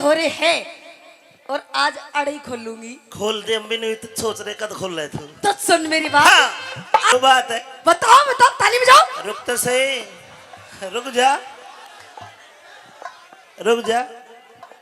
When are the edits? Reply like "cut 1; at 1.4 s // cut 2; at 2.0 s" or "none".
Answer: cut 1; at 7.1 s